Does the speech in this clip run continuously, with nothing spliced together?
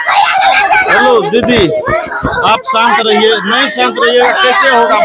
yes; 0 cuts

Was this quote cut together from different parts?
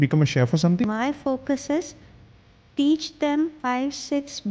yes; 2 cuts; at 0.8 s, 3.6 s

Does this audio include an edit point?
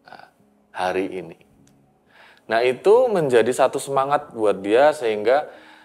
no; 0 cuts

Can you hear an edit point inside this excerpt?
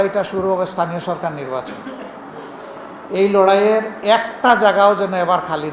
no; 0 cuts

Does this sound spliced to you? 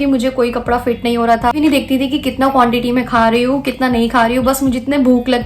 yes; 1 cut; at 1.6 s

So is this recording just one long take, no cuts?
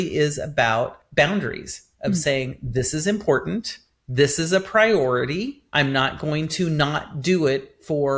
no; 2 cuts; at 1.0 s, 5.6 s

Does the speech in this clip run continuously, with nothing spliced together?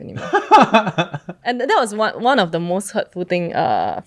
no; 1 cut; at 1.3 s

